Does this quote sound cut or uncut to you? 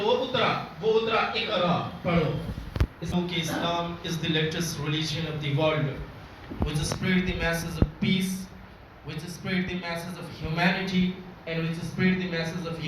cut